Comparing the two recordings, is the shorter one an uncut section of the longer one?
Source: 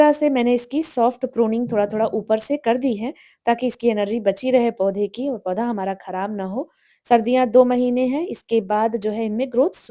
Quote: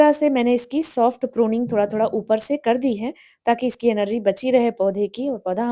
yes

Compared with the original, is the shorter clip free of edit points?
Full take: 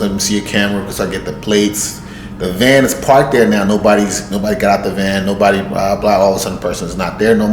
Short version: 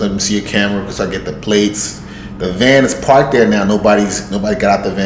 yes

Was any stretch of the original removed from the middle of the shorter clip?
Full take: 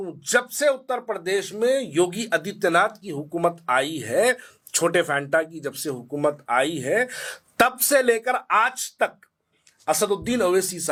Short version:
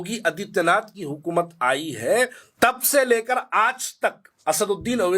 yes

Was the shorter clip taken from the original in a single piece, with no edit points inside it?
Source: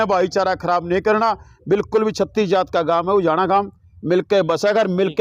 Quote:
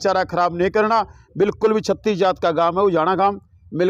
yes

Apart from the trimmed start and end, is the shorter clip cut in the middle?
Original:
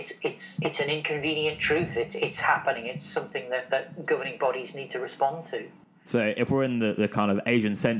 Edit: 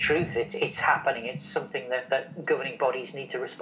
no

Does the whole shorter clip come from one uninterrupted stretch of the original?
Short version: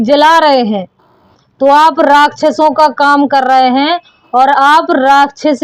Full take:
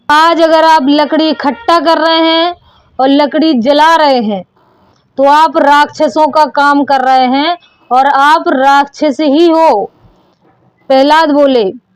yes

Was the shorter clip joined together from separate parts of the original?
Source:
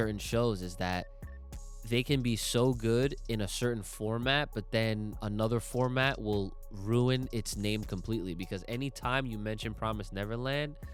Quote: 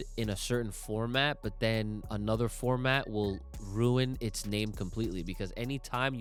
no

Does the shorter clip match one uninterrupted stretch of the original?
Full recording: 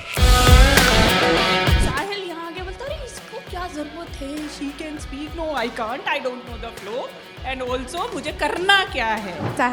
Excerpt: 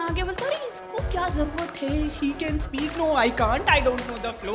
yes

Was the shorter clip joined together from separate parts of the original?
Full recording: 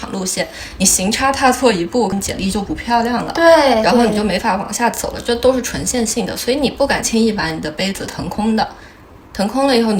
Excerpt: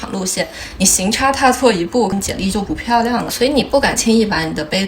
yes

